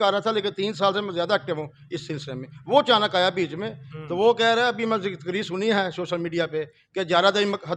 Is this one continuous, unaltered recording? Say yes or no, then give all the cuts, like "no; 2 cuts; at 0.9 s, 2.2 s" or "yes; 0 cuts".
yes; 0 cuts